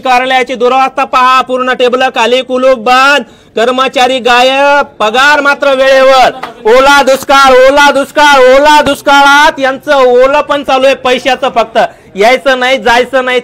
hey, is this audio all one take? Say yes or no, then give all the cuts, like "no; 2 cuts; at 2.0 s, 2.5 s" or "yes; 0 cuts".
yes; 0 cuts